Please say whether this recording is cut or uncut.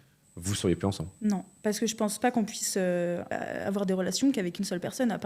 cut